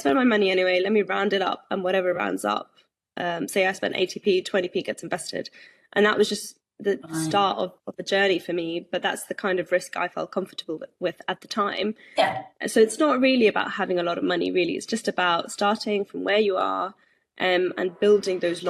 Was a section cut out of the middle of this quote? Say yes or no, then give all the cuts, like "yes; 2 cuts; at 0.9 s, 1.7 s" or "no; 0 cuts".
no; 0 cuts